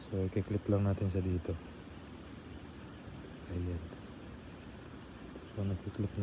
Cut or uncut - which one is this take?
uncut